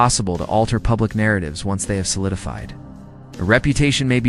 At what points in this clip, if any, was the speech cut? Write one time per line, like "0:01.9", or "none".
0:00.8
0:01.9